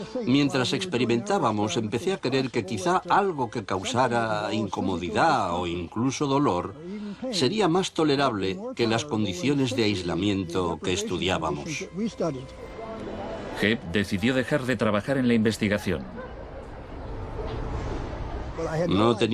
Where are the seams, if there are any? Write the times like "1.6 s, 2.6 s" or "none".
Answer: 7.6 s